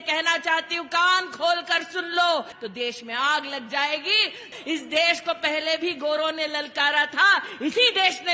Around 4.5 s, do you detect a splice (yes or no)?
yes